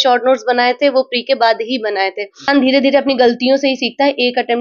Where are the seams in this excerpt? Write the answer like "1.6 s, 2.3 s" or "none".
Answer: 2.5 s